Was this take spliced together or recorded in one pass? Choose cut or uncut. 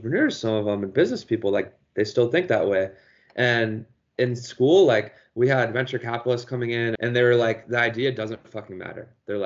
cut